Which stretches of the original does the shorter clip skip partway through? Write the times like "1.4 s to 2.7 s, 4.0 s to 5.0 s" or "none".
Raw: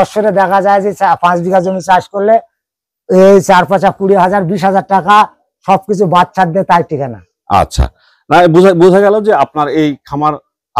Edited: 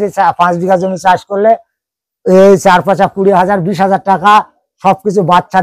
none

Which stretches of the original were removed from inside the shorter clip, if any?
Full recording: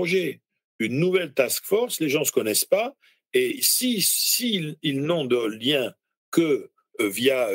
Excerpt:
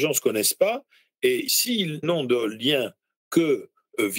3.8 s to 4.7 s

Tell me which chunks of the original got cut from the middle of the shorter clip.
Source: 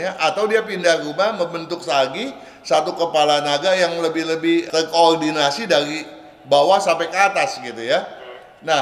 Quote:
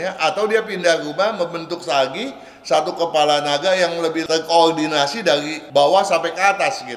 4.2 s to 4.7 s, 6.0 s to 6.3 s

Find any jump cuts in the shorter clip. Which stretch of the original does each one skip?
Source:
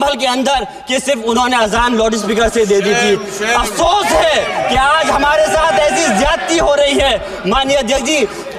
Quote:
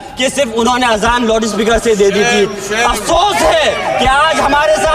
none

